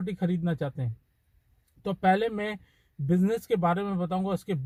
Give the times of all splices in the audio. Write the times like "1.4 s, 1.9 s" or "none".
none